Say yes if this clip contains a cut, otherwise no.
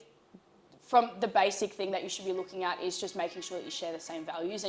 no